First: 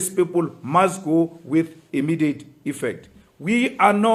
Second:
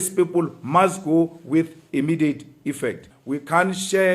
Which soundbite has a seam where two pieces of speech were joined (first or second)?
second